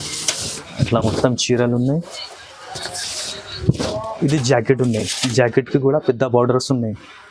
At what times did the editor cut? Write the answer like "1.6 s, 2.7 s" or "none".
none

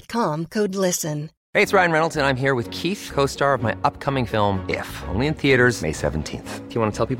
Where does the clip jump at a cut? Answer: 1.3 s

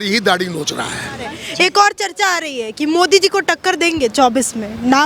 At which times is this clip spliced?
1.4 s

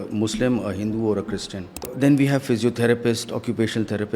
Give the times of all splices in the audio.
1.9 s

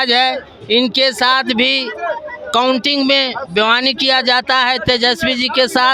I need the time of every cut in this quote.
none

